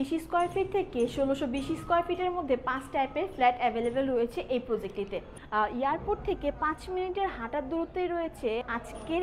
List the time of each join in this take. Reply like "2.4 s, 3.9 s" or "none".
5.4 s